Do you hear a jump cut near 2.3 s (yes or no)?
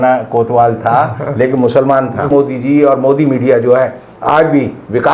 yes